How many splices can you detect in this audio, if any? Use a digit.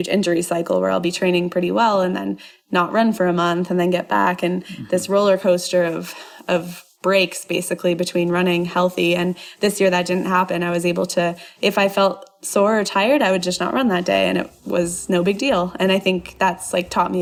0